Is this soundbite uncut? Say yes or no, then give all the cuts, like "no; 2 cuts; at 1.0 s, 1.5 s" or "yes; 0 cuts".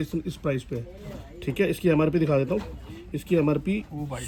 yes; 0 cuts